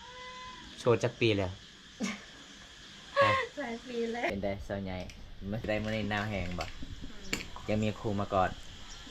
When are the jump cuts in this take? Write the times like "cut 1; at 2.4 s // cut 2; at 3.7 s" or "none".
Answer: cut 1; at 4.3 s // cut 2; at 5.7 s